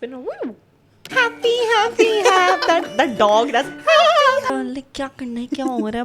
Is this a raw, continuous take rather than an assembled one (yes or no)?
no